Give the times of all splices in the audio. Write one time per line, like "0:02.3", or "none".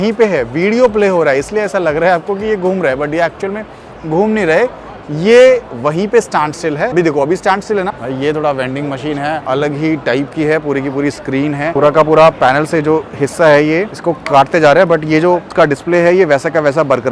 0:06.9
0:08.0
0:09.4
0:11.7
0:13.9
0:15.5